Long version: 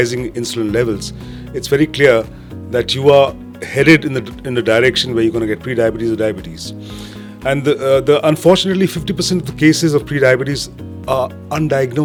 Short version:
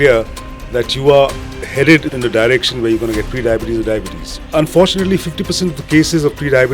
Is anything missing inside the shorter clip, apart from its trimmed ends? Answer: yes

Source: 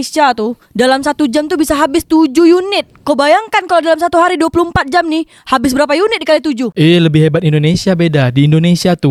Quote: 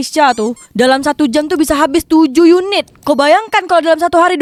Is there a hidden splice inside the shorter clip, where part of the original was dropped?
no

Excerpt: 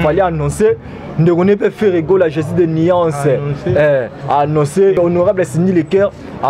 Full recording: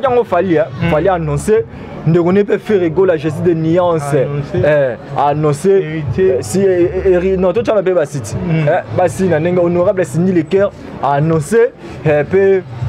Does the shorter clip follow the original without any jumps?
no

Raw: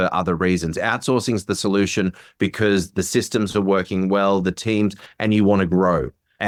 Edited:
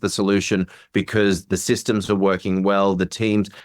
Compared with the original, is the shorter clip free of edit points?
yes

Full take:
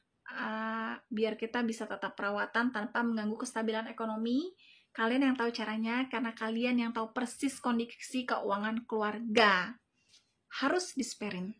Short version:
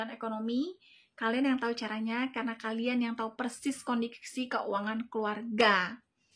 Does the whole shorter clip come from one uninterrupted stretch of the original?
yes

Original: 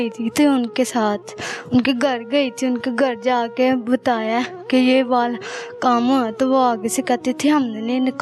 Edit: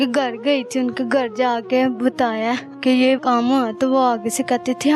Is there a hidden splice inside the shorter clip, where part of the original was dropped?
yes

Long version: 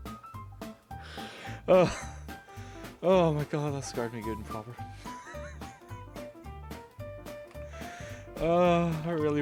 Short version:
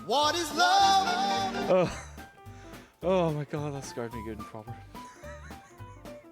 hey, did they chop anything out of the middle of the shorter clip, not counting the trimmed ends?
yes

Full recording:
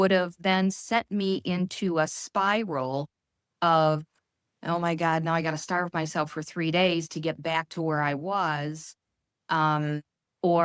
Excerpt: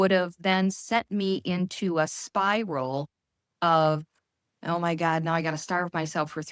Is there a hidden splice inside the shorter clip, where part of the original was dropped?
no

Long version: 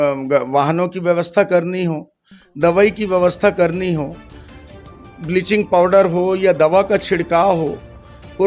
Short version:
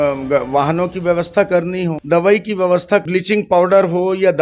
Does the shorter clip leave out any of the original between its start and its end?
yes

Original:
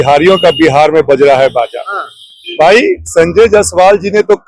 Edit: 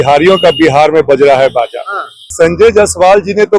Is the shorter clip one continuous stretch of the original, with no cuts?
no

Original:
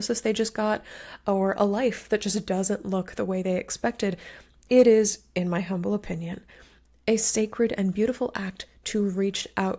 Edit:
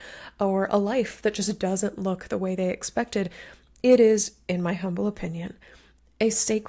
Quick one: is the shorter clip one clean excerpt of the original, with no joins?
yes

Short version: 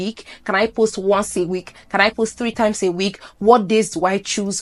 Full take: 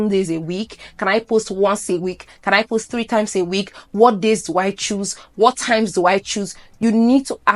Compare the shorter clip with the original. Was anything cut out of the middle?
no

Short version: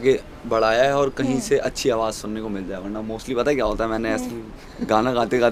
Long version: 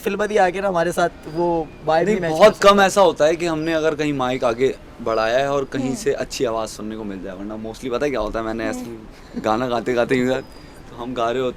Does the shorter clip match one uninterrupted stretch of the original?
yes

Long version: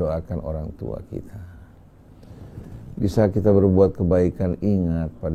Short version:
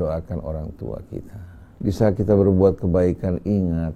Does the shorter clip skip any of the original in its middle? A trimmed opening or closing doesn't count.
yes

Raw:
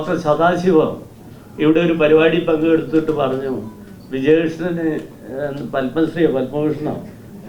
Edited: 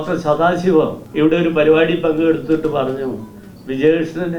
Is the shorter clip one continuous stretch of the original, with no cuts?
no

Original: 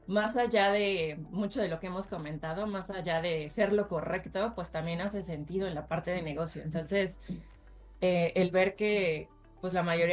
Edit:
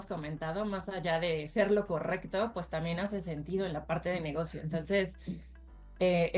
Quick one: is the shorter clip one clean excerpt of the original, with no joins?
yes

